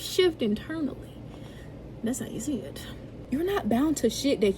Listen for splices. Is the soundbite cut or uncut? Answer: cut